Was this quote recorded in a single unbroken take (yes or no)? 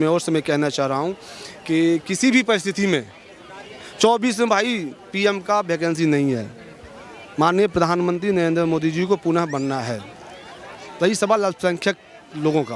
yes